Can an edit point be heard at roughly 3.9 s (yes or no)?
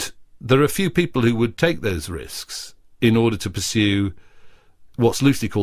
no